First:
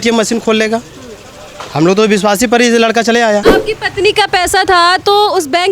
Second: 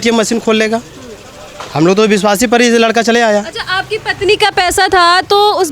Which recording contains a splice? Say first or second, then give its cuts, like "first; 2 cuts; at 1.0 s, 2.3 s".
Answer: first; 1 cut; at 3.5 s